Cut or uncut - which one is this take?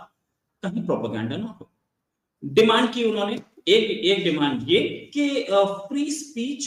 uncut